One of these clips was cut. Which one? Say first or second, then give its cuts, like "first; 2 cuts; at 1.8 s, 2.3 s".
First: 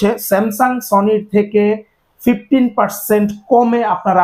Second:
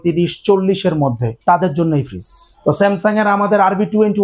second; 2 cuts; at 1.3 s, 2.4 s